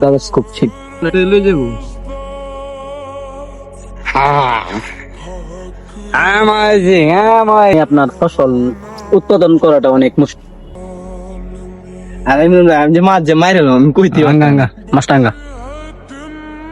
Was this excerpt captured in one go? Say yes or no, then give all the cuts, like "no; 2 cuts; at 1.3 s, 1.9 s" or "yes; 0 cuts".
no; 3 cuts; at 1.1 s, 7.7 s, 10.7 s